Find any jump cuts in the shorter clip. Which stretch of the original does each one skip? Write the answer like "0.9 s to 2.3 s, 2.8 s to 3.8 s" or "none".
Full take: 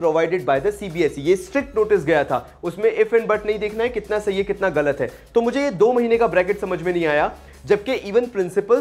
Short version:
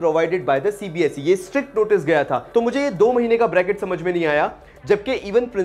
2.4 s to 5.2 s